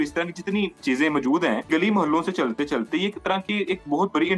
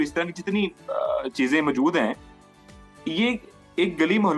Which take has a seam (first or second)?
first